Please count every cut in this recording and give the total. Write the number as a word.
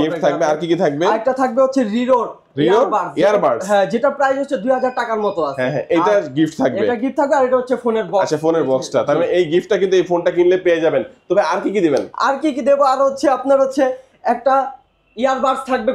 zero